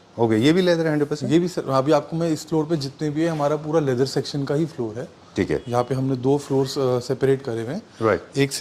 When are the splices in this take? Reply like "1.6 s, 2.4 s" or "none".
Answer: none